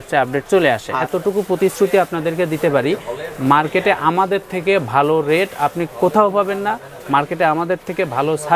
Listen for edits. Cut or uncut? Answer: cut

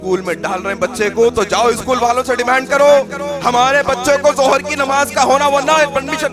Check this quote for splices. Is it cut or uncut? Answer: uncut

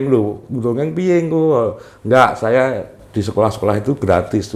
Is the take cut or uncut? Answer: uncut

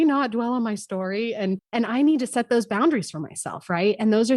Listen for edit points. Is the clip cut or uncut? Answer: cut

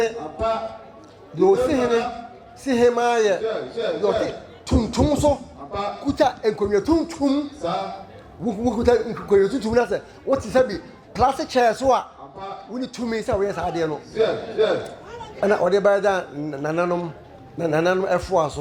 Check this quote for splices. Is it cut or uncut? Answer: uncut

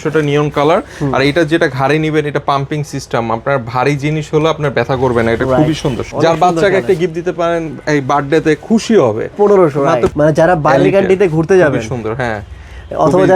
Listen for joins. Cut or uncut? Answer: cut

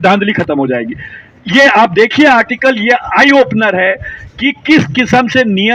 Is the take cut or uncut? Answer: uncut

